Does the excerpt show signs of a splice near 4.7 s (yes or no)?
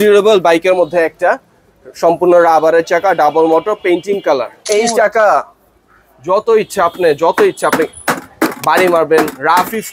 yes